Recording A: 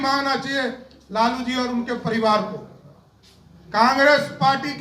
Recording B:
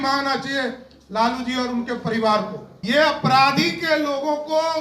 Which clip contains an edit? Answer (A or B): B